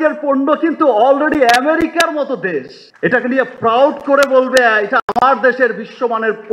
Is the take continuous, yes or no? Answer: no